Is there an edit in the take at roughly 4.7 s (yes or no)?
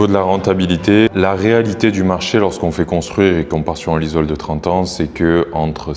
no